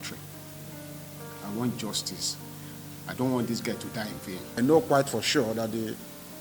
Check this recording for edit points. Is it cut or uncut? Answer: cut